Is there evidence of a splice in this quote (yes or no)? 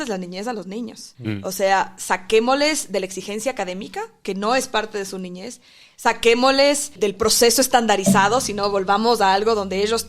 yes